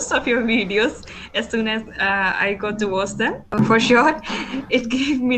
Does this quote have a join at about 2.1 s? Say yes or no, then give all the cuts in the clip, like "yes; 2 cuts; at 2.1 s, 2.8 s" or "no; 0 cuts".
no; 1 cut; at 3.6 s